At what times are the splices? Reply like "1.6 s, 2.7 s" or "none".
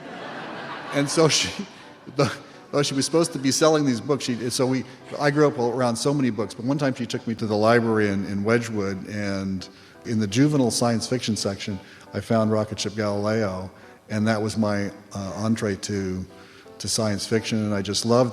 7.4 s, 10.1 s